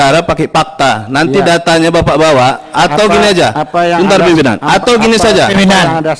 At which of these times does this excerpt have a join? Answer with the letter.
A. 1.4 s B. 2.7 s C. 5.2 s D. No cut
D